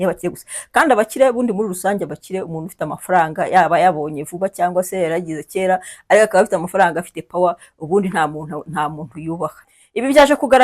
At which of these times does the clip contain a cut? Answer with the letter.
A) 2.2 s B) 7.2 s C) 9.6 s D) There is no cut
C